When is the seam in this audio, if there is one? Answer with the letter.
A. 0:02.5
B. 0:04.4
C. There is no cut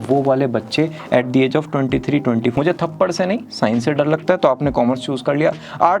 A